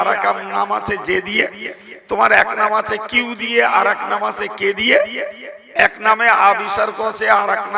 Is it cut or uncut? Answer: uncut